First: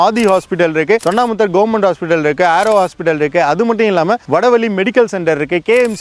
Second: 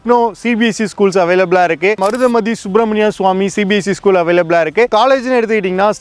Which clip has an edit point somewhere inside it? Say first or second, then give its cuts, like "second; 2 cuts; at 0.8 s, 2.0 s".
second; 2 cuts; at 2.0 s, 4.9 s